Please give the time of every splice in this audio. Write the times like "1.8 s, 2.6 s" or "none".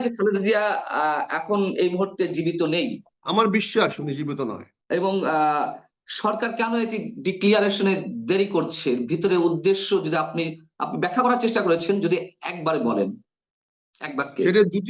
3.1 s, 4.7 s